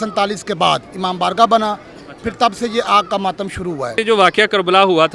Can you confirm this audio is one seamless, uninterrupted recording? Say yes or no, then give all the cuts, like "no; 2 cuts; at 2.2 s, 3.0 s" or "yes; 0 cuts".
no; 1 cut; at 3.9 s